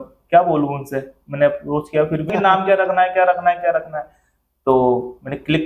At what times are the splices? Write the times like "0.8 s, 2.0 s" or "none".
2.3 s